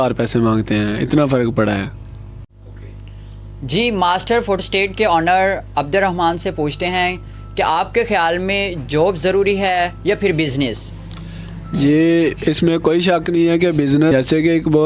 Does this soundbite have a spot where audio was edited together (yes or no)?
yes